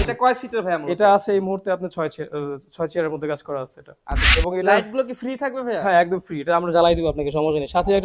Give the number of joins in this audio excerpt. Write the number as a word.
one